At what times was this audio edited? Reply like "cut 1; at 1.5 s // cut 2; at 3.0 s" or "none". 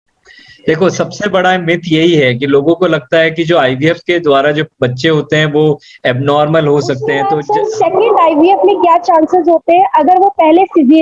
cut 1; at 7.3 s